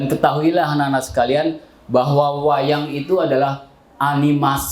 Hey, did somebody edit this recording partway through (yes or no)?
no